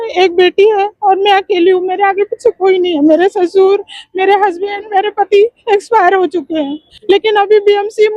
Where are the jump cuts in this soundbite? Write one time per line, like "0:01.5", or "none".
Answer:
0:06.9

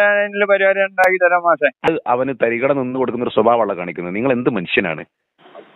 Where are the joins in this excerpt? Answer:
0:01.9

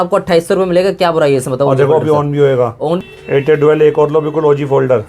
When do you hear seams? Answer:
0:03.0

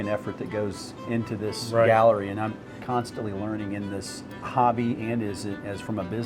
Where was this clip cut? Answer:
0:02.7
0:04.5

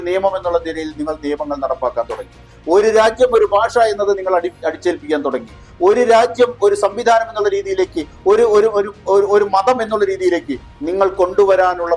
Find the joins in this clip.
none

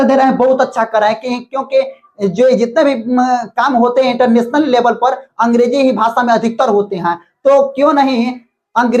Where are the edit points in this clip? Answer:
none

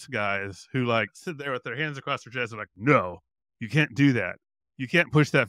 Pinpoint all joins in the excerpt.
0:01.2

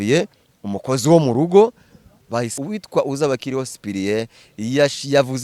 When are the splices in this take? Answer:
0:02.6

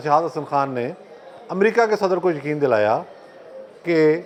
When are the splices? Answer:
none

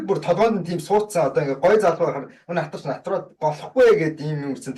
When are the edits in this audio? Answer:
none

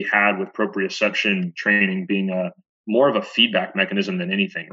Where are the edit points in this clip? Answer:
0:01.5
0:02.7

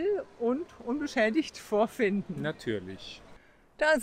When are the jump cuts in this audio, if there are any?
none

